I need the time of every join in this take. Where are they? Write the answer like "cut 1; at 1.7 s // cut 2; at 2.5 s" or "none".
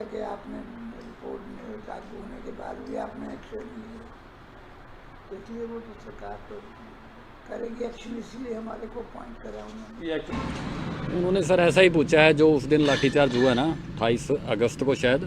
cut 1; at 10.3 s